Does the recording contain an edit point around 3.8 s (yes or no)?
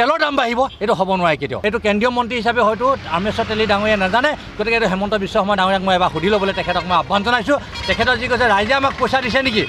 no